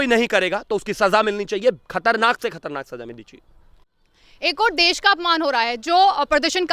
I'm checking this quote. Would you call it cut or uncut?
uncut